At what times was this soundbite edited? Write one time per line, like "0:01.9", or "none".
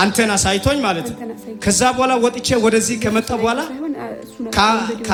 none